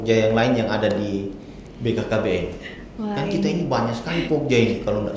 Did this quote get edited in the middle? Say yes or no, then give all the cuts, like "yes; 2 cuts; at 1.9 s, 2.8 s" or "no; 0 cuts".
no; 0 cuts